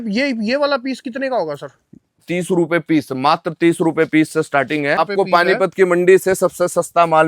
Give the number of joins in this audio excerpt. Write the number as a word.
two